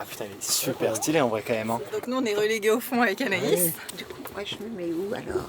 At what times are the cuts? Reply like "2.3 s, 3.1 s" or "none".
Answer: 2.0 s, 3.9 s